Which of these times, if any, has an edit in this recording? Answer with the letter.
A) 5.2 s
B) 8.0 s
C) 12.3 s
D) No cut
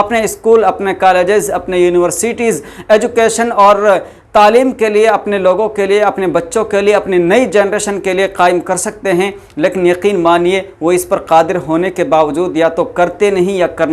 D